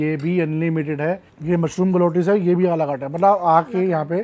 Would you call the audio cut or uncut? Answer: cut